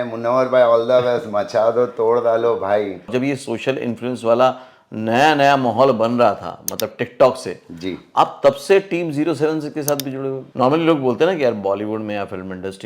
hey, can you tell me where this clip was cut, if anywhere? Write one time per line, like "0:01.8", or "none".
0:03.1
0:10.4